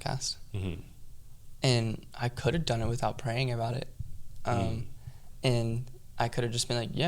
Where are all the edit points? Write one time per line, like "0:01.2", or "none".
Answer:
none